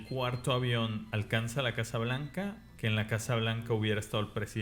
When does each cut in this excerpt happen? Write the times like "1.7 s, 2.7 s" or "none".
1.1 s, 2.7 s